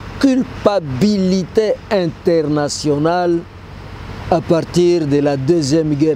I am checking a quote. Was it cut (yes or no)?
no